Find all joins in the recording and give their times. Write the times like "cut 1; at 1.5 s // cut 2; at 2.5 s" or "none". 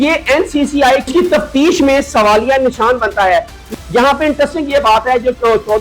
cut 1; at 3.7 s

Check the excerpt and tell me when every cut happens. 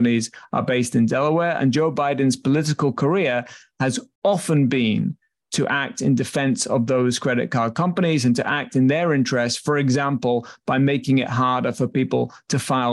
none

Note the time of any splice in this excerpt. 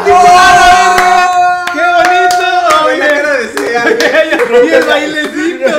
cut 1; at 4.4 s

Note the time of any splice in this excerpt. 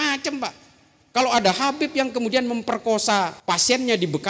cut 1; at 3.4 s

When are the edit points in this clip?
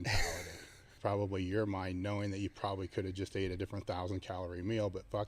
cut 1; at 1.0 s

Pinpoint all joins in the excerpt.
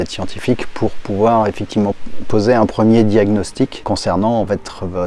cut 1; at 2.0 s // cut 2; at 3.8 s

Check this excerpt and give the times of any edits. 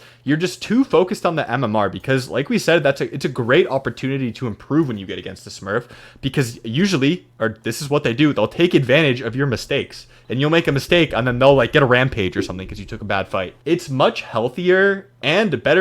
cut 1; at 13.6 s

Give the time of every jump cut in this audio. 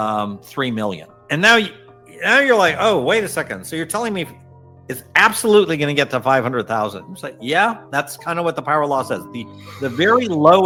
none

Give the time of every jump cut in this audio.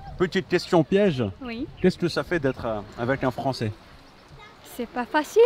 none

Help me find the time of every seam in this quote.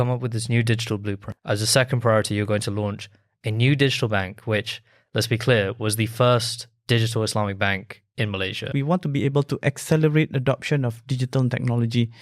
cut 1; at 1.3 s // cut 2; at 8.7 s

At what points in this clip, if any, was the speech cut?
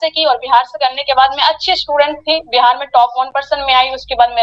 none

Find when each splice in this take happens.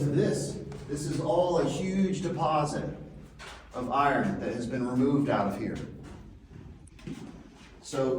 cut 1; at 6.8 s

